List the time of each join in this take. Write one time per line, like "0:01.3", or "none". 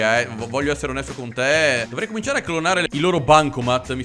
0:01.9